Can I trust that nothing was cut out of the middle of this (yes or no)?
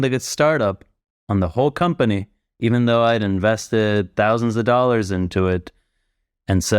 yes